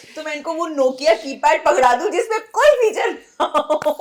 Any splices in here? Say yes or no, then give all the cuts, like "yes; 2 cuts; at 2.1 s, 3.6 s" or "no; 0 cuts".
no; 0 cuts